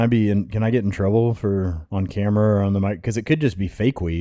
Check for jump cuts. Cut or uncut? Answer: cut